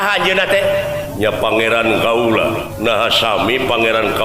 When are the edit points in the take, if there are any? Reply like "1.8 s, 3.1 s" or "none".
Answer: 1.1 s, 2.7 s

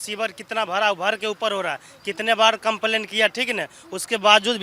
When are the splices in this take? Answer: none

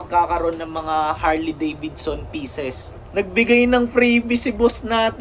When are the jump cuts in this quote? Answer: 2.9 s

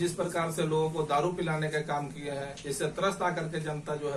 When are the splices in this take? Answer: none

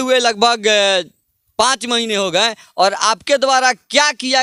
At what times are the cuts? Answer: none

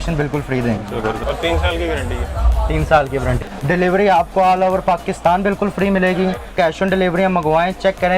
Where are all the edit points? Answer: 1.2 s, 3.4 s, 6.5 s

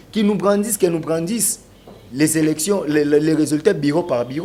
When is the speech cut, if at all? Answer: none

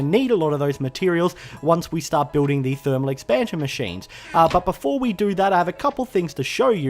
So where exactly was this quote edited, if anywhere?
3.4 s

